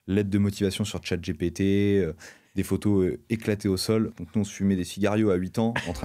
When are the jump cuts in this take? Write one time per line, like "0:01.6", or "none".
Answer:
0:04.1

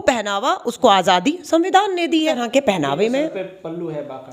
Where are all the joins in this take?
0:02.4

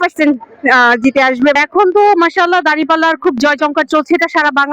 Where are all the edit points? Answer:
0:01.5

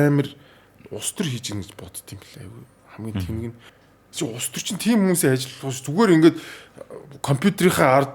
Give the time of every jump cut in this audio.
0:03.7

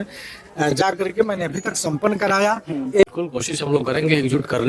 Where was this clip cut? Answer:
0:03.0

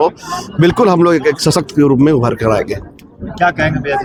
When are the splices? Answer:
none

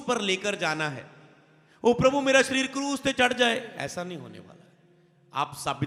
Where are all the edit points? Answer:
none

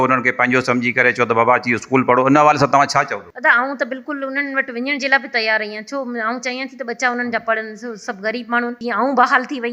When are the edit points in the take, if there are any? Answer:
0:03.2
0:08.8

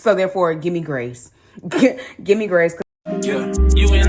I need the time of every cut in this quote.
0:02.8

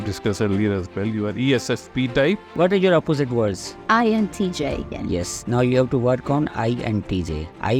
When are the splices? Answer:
0:02.5
0:03.7
0:04.9

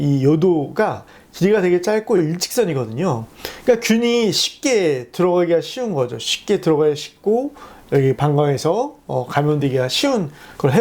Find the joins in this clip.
none

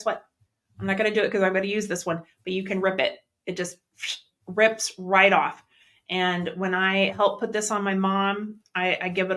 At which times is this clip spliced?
none

